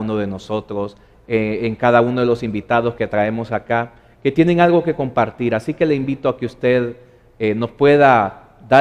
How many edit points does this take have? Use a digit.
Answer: 1